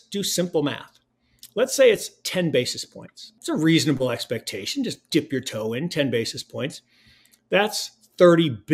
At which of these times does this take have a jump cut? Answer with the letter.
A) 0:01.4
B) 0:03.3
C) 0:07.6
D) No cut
B